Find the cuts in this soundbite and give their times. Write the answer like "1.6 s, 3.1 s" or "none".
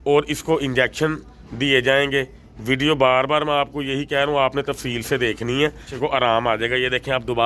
2.4 s, 5.9 s